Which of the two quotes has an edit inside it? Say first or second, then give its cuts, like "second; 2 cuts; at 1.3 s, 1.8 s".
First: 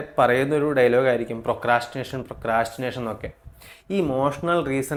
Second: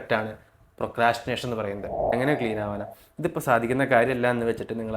second; 1 cut; at 2.1 s